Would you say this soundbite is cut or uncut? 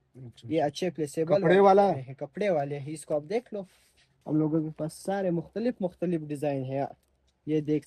cut